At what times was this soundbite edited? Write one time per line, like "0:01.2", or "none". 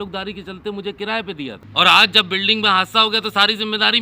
0:01.6